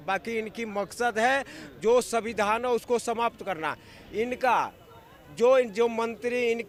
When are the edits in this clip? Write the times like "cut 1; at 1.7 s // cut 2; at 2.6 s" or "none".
none